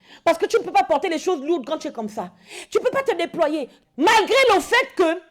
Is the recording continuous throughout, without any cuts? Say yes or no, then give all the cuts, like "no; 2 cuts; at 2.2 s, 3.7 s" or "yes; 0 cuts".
no; 1 cut; at 3.7 s